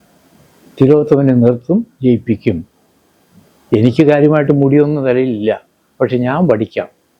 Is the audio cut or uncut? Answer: uncut